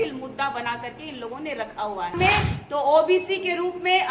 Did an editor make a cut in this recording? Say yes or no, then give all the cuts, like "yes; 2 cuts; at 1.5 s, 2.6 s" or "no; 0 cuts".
yes; 1 cut; at 2.2 s